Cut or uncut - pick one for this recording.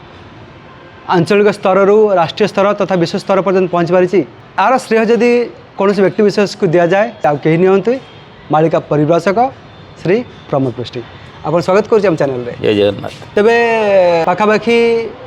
cut